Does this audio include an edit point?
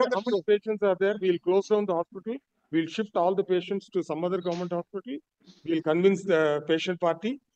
no; 0 cuts

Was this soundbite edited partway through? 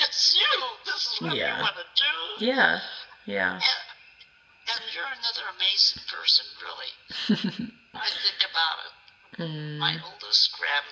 no; 0 cuts

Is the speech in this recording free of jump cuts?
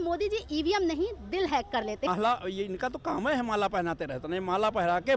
no; 1 cut; at 2.1 s

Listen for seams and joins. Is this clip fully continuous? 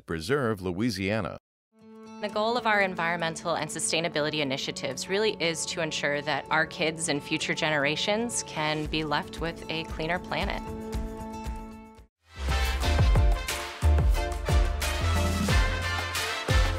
yes; 0 cuts

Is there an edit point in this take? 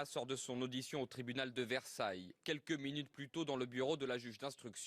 yes; 1 cut; at 1.9 s

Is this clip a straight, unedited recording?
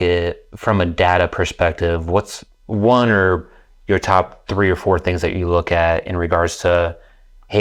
yes; 0 cuts

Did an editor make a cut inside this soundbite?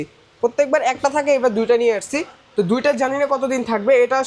no; 0 cuts

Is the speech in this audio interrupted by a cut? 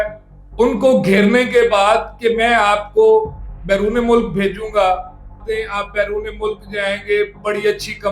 yes; 1 cut; at 5.4 s

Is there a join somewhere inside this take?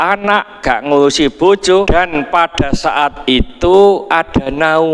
yes; 1 cut; at 1.9 s

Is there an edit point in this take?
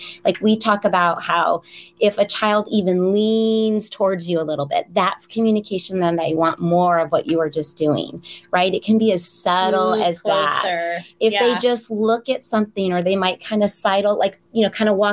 no; 0 cuts

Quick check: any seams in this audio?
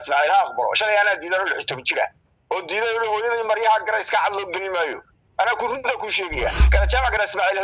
yes; 1 cut; at 6.6 s

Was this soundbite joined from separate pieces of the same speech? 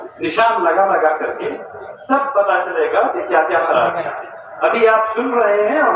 no; 0 cuts

